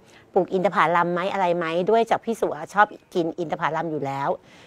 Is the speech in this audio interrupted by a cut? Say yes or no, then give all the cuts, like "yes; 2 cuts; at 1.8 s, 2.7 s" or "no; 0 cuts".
no; 0 cuts